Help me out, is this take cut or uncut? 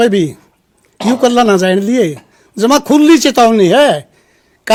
uncut